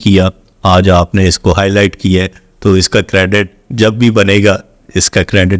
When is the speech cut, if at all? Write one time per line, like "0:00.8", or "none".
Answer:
none